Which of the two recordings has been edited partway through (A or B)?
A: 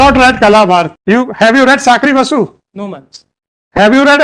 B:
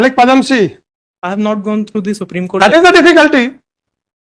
A